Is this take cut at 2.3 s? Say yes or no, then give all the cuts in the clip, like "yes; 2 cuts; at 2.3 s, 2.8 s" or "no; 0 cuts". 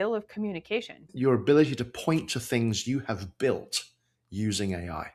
no; 1 cut; at 1.0 s